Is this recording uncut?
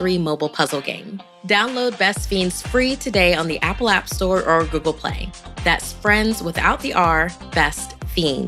yes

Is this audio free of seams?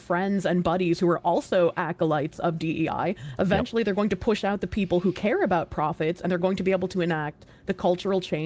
yes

